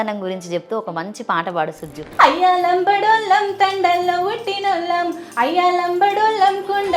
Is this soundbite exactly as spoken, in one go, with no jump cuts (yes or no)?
no